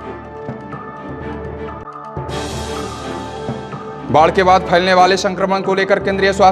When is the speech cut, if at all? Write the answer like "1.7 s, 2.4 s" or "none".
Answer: 3.8 s